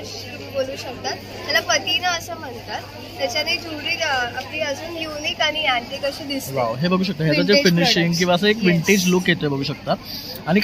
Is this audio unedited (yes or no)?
yes